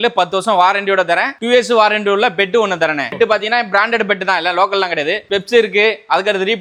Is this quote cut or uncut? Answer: uncut